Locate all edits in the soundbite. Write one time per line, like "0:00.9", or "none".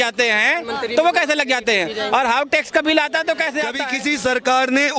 0:03.9